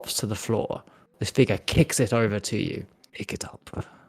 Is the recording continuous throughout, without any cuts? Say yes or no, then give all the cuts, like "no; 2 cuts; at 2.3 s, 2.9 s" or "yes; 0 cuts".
no; 1 cut; at 3.0 s